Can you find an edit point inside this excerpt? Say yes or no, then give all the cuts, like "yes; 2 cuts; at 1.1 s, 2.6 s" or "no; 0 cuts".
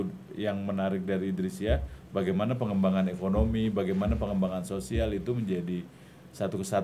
no; 0 cuts